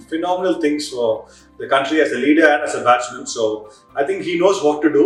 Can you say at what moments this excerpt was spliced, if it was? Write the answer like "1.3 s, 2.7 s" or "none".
none